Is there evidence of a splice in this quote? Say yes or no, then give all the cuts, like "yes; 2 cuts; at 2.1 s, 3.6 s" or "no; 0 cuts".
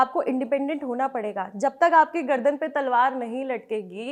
no; 0 cuts